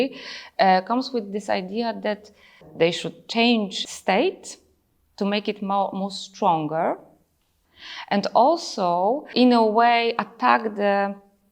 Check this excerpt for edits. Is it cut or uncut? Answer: cut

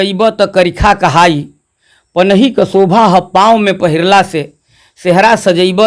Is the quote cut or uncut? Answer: uncut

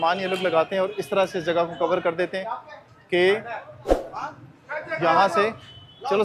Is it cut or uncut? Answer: uncut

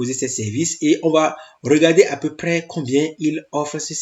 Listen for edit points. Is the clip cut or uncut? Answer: uncut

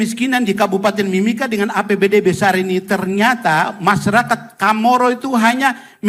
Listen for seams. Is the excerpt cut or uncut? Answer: uncut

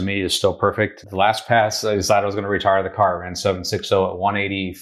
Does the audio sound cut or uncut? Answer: cut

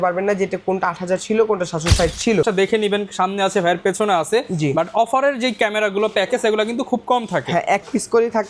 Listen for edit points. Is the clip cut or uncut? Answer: cut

